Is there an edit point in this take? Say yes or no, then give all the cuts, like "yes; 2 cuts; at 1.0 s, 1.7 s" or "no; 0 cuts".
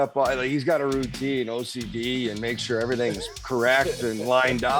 no; 0 cuts